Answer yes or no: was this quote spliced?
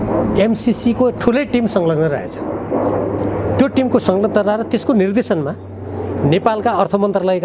no